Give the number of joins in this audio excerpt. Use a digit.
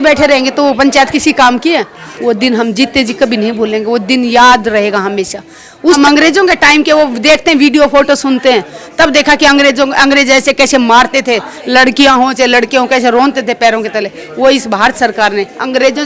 2